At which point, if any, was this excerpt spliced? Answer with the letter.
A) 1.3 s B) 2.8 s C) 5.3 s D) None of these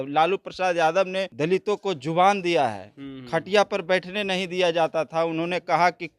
A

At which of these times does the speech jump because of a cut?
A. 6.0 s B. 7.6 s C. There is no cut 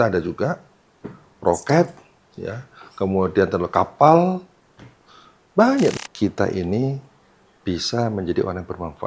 A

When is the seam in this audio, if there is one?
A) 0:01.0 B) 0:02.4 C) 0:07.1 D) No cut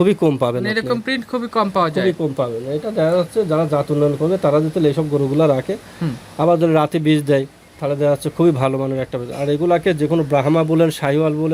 D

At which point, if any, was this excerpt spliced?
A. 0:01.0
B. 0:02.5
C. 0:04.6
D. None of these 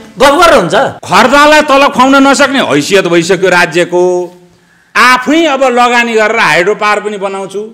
A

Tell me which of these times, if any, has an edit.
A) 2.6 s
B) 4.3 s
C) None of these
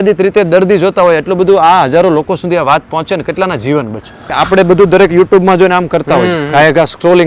B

